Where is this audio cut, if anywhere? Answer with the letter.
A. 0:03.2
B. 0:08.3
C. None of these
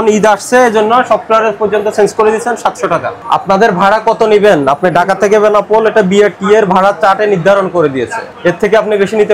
A